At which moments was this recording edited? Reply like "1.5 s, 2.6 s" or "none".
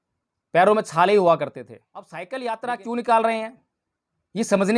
2.2 s